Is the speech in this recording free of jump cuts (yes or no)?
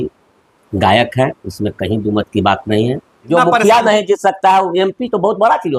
no